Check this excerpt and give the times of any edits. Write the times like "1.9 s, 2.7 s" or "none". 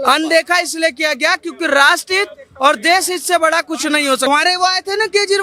4.3 s